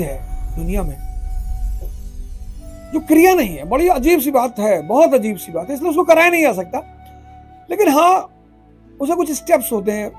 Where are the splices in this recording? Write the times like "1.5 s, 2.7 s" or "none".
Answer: none